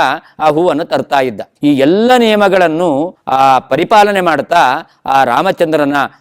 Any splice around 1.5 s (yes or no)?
yes